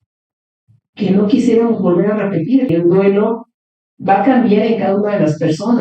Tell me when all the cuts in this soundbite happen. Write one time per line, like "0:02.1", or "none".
0:02.7